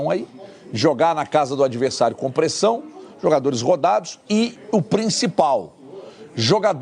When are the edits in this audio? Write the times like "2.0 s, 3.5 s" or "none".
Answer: none